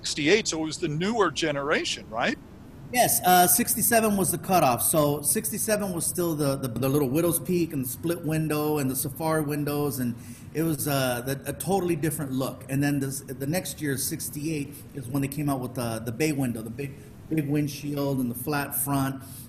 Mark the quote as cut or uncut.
cut